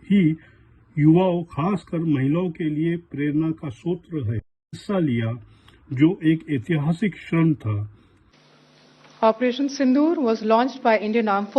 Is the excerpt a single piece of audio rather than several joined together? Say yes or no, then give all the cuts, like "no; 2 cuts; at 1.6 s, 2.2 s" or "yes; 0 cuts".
no; 1 cut; at 4.8 s